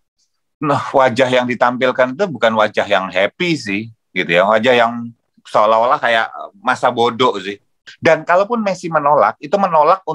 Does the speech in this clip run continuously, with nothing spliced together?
no; 1 cut; at 7.9 s

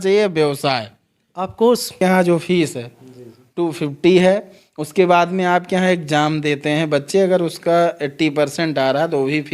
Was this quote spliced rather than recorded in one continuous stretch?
yes; 1 cut; at 1.9 s

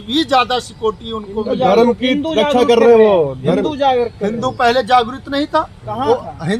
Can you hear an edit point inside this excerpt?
no; 0 cuts

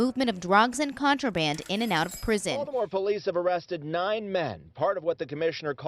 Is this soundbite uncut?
no; 1 cut; at 2.6 s

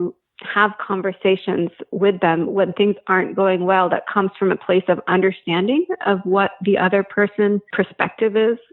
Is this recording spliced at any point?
yes; 1 cut; at 7.7 s

